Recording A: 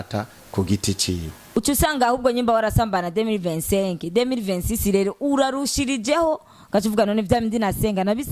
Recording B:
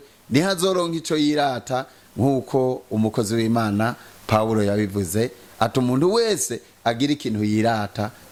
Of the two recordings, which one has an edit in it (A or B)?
A